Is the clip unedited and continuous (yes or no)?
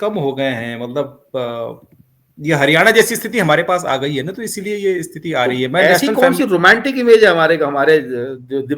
no